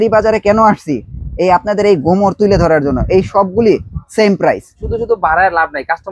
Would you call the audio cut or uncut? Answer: cut